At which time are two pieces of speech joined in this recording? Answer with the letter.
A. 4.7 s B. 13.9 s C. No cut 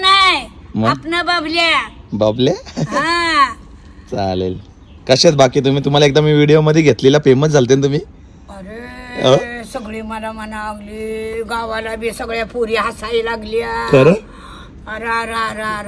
C